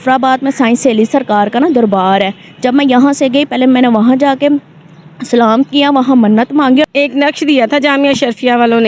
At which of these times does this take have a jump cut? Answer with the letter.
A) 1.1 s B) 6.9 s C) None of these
B